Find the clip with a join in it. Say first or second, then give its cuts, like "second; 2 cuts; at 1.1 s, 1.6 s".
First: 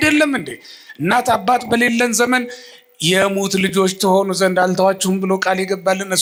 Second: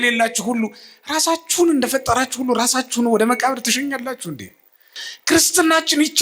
second; 1 cut; at 5.0 s